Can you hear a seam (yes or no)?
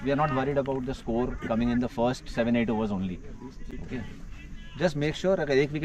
no